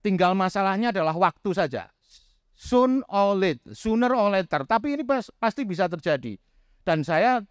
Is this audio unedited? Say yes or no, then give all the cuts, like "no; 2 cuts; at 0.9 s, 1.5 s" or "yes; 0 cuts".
yes; 0 cuts